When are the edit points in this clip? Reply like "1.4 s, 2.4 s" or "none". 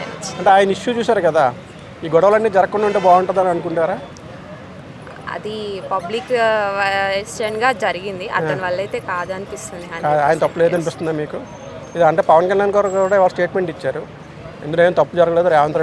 none